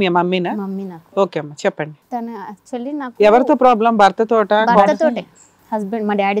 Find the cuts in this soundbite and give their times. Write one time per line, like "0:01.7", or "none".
0:05.0